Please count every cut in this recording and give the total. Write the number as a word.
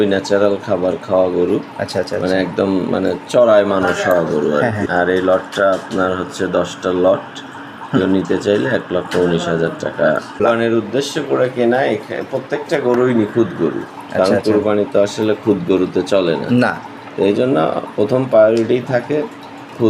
two